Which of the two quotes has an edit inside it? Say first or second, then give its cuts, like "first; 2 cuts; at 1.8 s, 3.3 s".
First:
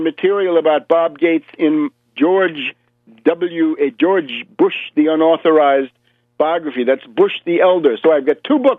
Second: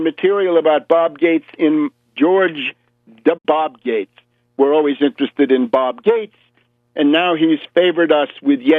first; 1 cut; at 3.4 s